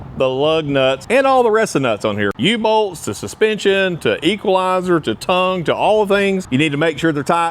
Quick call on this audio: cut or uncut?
cut